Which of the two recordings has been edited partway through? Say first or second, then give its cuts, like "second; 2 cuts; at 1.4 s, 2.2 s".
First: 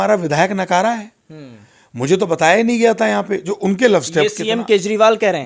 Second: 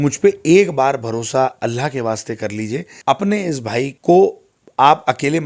second; 2 cuts; at 2.9 s, 3.9 s